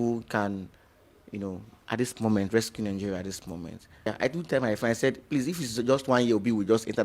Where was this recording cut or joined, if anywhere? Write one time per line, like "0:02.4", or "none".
0:04.1